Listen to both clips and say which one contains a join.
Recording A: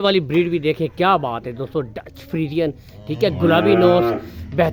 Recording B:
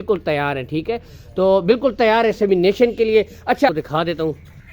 B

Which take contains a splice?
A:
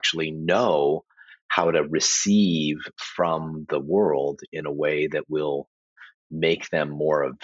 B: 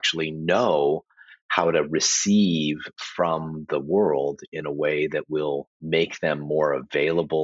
B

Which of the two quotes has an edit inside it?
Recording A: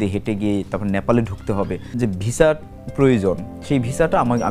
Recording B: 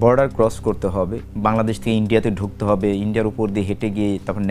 A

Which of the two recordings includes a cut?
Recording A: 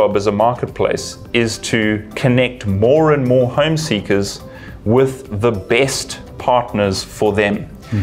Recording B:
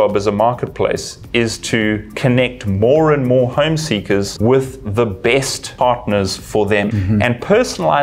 B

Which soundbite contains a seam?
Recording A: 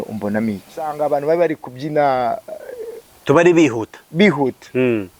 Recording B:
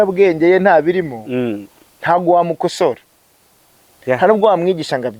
A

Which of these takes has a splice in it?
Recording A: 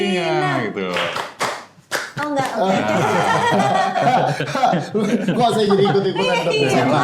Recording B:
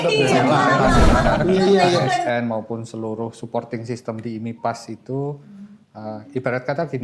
B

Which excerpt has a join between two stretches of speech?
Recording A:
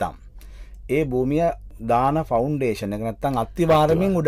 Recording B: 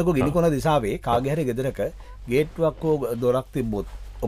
A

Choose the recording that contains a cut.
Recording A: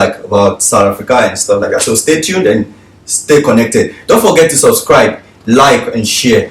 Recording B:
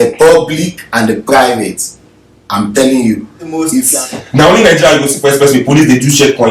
B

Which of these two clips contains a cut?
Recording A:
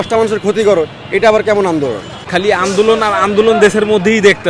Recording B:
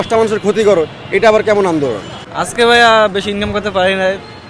A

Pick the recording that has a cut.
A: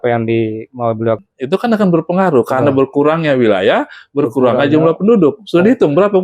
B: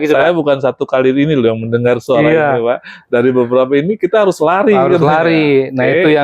A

